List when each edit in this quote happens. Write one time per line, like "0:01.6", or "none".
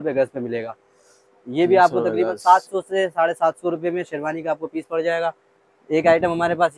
none